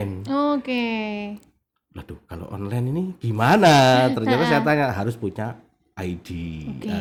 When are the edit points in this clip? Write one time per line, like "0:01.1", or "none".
none